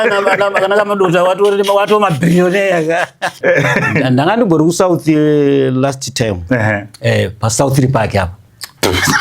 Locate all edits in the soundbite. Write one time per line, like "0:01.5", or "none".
0:03.4